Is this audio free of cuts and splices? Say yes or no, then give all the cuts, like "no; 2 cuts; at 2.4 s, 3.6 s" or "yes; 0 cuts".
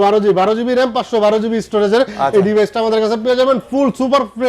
yes; 0 cuts